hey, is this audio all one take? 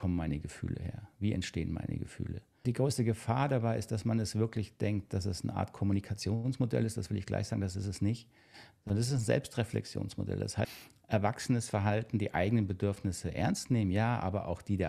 no; 2 cuts; at 2.4 s, 10.6 s

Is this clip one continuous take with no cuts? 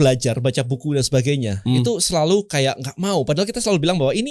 yes; 0 cuts

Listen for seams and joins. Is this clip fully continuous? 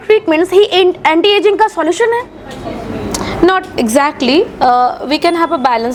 yes; 0 cuts

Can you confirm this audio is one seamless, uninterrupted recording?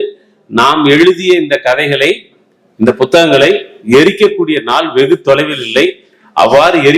yes; 0 cuts

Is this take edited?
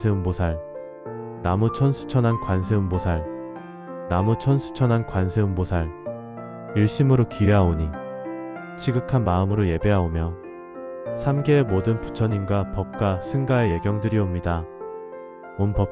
no; 0 cuts

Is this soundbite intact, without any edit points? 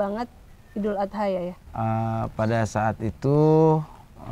no; 1 cut; at 1.6 s

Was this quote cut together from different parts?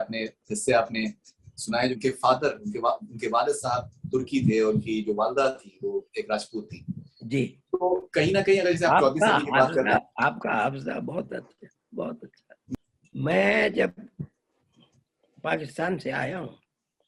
yes; 2 cuts; at 1.9 s, 12.8 s

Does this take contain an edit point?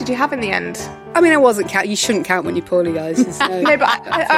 yes; 1 cut; at 1.0 s

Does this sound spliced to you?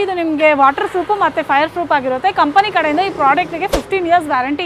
no; 0 cuts

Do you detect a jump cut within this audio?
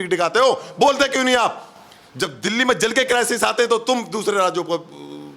no; 0 cuts

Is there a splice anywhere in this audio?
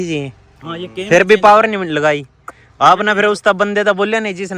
no; 0 cuts

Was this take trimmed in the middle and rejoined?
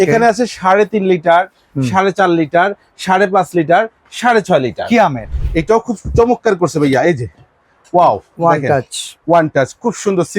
yes; 1 cut; at 5.3 s

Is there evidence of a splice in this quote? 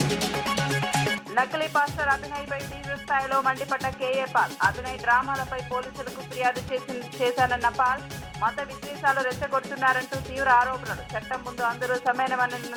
no; 0 cuts

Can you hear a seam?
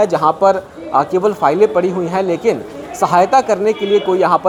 no; 0 cuts

